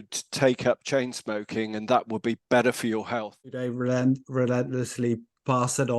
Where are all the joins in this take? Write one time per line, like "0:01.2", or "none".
0:03.6